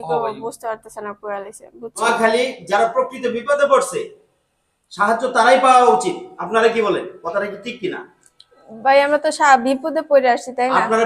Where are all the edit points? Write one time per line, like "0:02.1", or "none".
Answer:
0:02.1